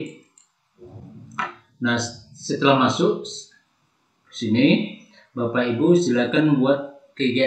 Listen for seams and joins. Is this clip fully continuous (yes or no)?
yes